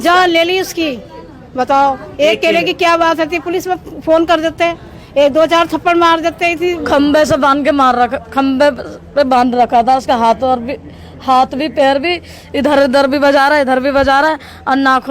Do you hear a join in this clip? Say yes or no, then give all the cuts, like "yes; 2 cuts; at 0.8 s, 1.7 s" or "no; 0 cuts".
yes; 1 cut; at 6.8 s